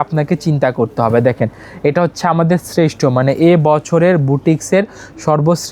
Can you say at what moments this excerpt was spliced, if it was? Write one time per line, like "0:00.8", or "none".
none

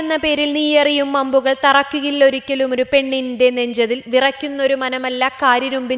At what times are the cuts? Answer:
none

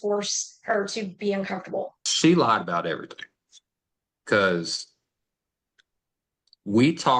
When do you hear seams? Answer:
0:02.0

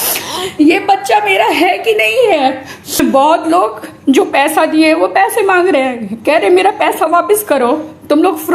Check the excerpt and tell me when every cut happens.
0:03.0

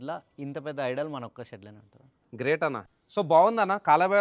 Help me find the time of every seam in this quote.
0:02.9

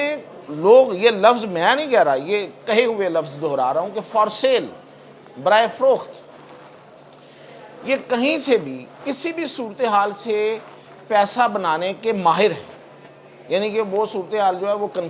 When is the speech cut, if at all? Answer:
none

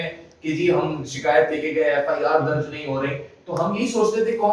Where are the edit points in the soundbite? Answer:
none

